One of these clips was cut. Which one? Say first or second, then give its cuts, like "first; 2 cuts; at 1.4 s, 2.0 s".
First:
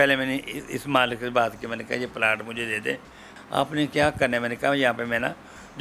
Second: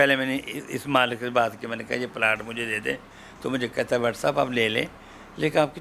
first; 1 cut; at 3.3 s